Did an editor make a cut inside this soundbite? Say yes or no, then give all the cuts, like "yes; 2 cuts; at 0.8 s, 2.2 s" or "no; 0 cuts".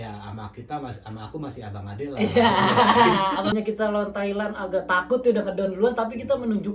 yes; 1 cut; at 3.5 s